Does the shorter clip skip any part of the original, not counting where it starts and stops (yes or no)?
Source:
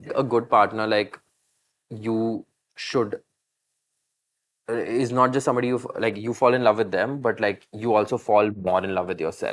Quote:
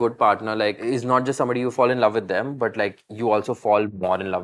yes